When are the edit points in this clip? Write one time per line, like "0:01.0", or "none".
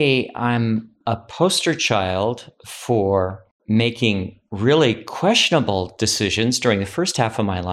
0:00.9
0:03.5